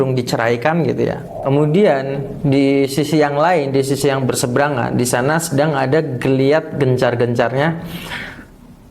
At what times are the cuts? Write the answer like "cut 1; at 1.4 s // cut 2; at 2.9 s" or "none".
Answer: cut 1; at 1.3 s